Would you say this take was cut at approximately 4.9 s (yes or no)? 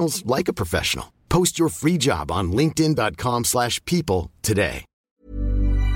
yes